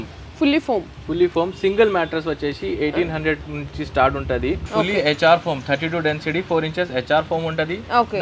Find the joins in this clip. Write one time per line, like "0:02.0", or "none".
0:04.6